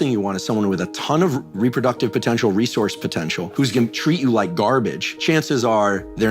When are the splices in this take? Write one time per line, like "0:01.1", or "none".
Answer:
0:03.5
0:05.0

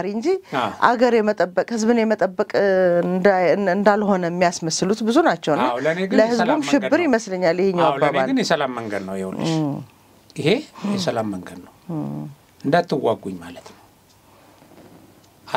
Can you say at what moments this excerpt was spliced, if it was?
none

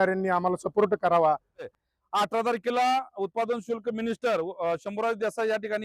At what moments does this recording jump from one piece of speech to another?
0:01.7

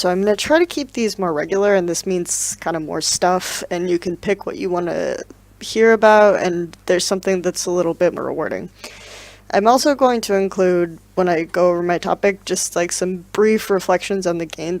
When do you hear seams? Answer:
none

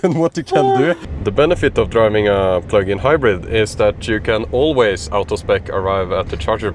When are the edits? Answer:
0:01.1

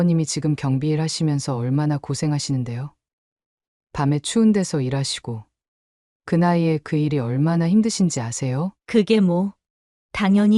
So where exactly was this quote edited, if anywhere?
0:08.8

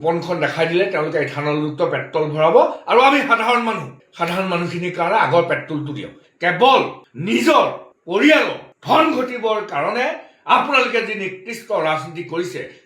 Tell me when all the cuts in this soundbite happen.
0:06.1

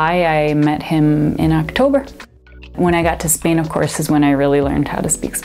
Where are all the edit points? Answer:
0:02.6

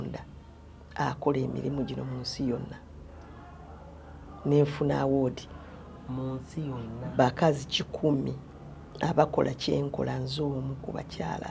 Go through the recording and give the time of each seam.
none

